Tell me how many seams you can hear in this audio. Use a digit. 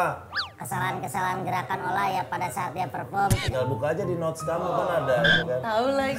0